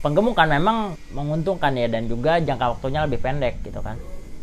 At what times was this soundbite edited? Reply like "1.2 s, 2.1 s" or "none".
1.1 s